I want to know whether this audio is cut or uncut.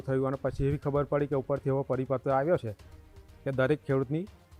uncut